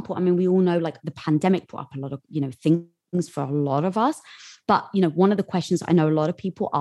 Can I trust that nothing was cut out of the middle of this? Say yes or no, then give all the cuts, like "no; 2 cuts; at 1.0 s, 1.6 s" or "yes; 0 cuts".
yes; 0 cuts